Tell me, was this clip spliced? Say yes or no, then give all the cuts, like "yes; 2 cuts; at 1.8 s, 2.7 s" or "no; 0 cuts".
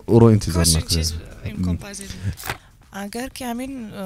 yes; 1 cut; at 2.5 s